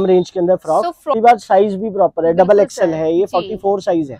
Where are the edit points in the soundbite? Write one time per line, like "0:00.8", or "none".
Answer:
0:01.1